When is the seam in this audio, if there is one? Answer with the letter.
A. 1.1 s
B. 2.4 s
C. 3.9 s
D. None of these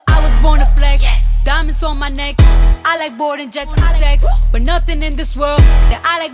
C